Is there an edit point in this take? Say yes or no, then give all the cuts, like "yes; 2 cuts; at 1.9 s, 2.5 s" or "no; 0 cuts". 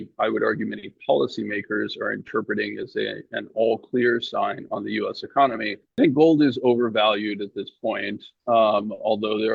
yes; 1 cut; at 6.0 s